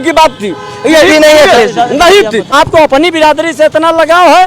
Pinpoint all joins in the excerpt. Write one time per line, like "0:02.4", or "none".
0:02.5